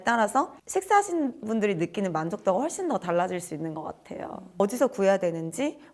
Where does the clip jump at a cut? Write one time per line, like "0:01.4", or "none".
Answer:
0:04.5